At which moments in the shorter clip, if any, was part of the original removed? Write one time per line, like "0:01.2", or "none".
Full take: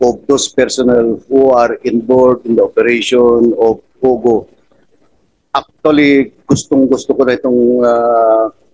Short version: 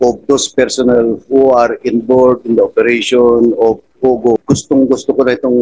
0:04.4